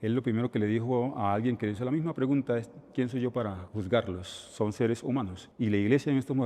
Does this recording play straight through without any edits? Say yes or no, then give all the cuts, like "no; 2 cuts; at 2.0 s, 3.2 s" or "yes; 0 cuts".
yes; 0 cuts